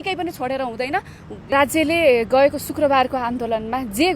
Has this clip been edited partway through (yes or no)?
yes